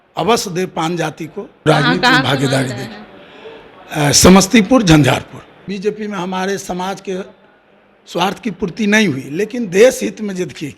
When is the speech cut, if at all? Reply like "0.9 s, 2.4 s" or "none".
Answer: 1.7 s, 5.7 s